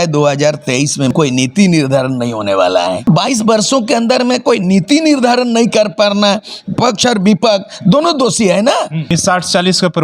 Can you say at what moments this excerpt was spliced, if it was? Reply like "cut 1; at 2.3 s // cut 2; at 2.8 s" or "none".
cut 1; at 1.1 s // cut 2; at 3.0 s // cut 3; at 9.0 s